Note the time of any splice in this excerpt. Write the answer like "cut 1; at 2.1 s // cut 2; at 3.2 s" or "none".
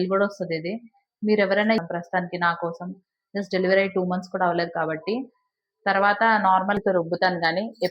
cut 1; at 1.8 s // cut 2; at 6.8 s